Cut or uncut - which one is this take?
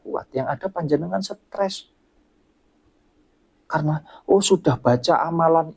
uncut